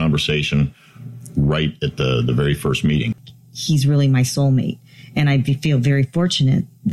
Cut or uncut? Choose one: cut